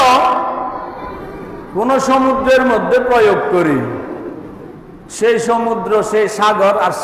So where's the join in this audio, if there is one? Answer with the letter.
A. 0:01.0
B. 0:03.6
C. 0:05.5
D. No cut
D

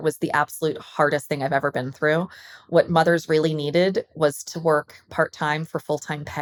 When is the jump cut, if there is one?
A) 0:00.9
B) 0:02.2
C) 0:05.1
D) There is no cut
D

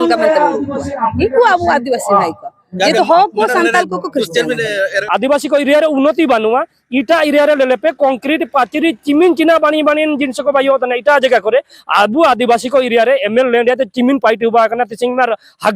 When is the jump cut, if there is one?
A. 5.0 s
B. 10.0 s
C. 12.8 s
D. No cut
A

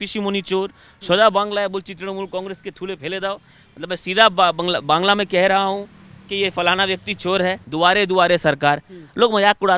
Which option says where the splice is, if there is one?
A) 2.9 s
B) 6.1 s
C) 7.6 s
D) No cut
C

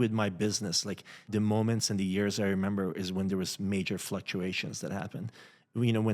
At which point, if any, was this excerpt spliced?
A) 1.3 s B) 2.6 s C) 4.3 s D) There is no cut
A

